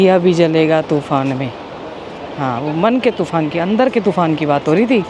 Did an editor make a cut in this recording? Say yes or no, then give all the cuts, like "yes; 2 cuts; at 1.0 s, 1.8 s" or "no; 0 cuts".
no; 0 cuts